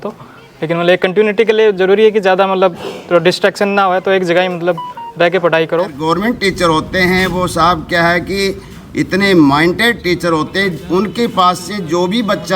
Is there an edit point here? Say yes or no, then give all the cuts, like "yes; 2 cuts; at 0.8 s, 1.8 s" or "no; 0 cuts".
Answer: yes; 1 cut; at 6.0 s